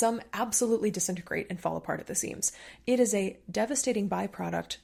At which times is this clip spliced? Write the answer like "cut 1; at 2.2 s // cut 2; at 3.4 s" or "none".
none